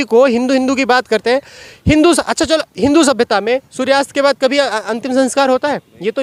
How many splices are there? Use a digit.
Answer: 0